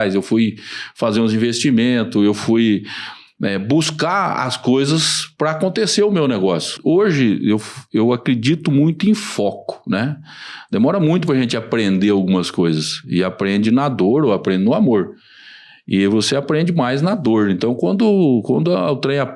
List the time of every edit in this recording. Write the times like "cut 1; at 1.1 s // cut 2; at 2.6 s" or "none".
cut 1; at 6.7 s